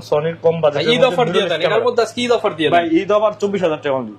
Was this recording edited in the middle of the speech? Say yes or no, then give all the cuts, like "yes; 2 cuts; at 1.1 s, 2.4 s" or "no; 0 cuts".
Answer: no; 0 cuts